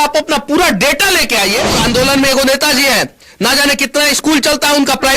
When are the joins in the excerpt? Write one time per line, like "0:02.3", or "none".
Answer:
0:01.7